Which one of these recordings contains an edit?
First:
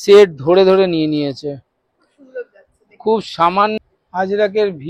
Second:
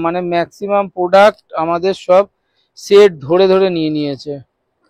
first; 1 cut; at 3.8 s

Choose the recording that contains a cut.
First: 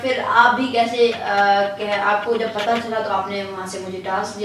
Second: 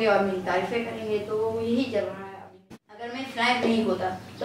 second; 1 cut; at 2.5 s

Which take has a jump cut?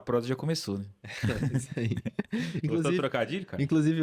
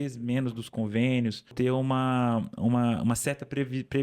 second; 1 cut; at 1.5 s

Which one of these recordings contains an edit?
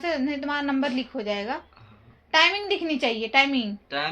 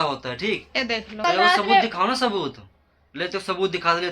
second; 1 cut; at 1.1 s

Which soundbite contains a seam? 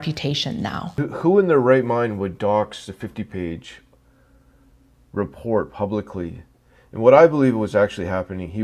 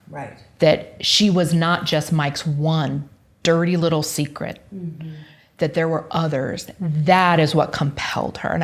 first; 1 cut; at 0.9 s

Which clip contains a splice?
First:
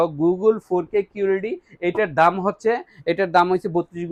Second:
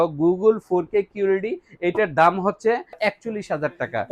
second; 1 cut; at 3.0 s

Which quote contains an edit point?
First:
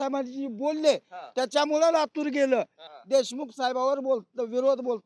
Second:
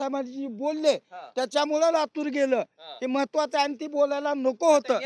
first; 1 cut; at 2.9 s

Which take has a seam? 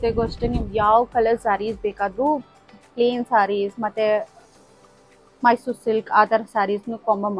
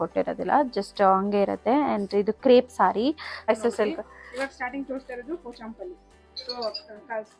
second; 1 cut; at 3.5 s

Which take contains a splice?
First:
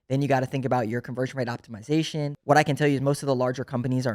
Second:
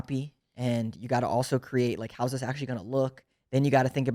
first; 1 cut; at 2.3 s

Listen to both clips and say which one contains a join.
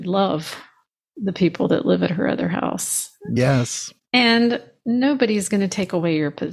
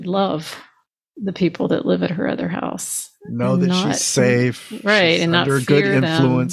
first; 1 cut; at 3.2 s

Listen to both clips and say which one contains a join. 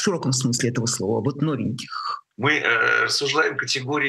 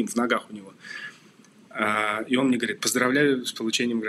first; 1 cut; at 2.2 s

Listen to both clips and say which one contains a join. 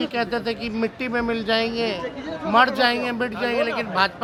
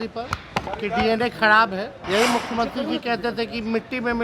second; 1 cut; at 2.0 s

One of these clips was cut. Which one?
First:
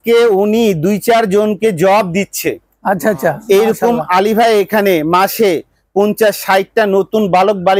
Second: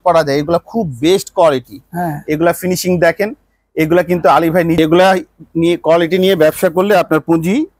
second; 1 cut; at 4.8 s

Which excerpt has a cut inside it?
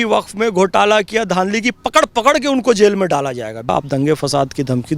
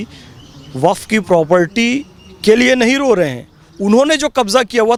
first; 1 cut; at 3.7 s

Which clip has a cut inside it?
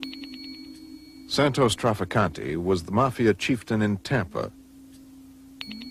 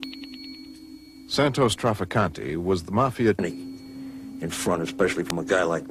first; 1 cut; at 3.4 s

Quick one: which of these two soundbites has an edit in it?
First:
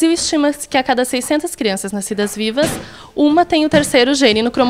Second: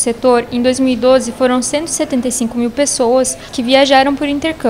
second; 1 cut; at 3.5 s

